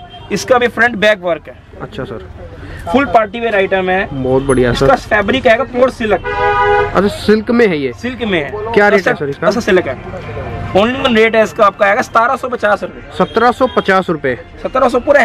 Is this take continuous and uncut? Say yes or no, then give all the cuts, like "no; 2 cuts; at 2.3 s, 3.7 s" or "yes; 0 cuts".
yes; 0 cuts